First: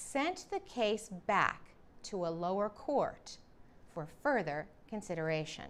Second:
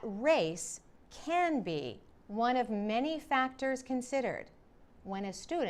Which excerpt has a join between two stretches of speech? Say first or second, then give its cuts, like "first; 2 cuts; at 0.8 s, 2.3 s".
second; 1 cut; at 2.7 s